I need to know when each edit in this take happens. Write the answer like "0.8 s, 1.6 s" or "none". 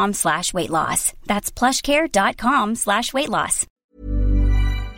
3.7 s